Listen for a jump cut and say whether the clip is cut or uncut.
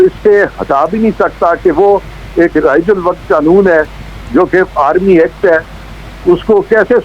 uncut